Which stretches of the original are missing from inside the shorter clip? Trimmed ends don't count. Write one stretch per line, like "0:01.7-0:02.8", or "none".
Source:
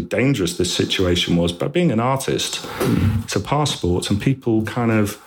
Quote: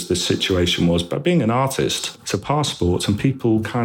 0:02.7-0:03.2